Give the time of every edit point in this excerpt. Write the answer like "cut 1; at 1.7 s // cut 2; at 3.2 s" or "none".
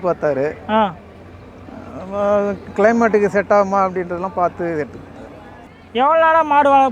cut 1; at 5.5 s